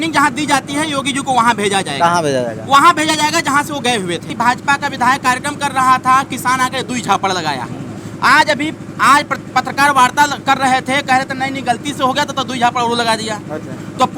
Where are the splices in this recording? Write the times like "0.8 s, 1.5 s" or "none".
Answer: 4.3 s